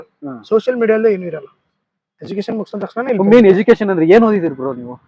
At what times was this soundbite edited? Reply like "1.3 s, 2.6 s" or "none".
2.1 s